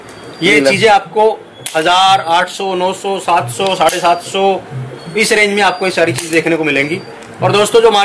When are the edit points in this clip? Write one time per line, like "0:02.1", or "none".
none